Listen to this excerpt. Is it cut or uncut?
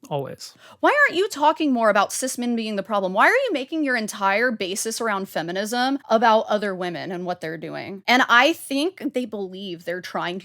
cut